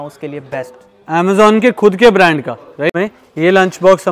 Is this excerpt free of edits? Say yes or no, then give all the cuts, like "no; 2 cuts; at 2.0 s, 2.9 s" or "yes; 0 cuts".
no; 1 cut; at 2.9 s